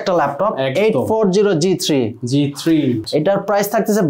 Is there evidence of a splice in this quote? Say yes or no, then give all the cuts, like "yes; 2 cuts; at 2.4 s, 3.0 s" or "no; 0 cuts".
yes; 1 cut; at 3.0 s